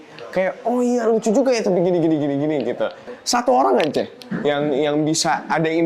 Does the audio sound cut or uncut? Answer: cut